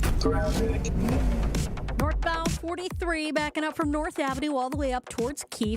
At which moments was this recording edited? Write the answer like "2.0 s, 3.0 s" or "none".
1.9 s